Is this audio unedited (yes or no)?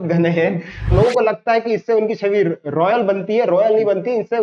no